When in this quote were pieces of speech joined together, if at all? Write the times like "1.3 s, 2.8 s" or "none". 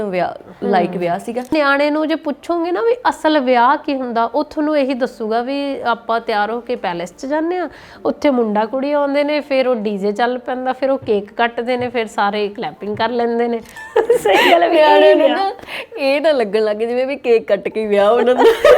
1.5 s, 13.8 s